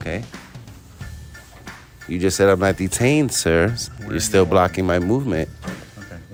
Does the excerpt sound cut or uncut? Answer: uncut